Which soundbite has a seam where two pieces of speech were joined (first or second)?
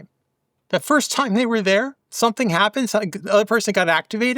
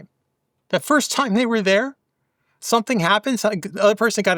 first